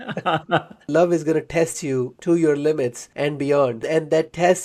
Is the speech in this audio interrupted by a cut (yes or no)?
yes